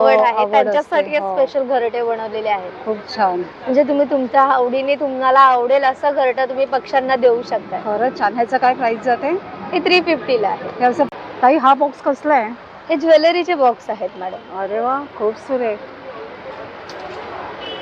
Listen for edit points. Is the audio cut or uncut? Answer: uncut